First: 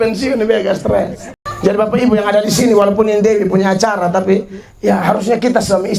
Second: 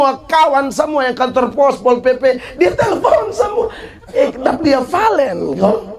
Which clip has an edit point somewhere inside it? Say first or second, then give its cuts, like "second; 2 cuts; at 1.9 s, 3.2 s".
first; 1 cut; at 1.3 s